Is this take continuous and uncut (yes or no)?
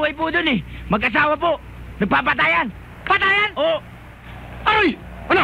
yes